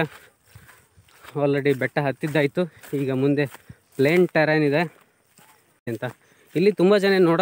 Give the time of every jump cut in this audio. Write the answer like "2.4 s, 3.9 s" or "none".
5.9 s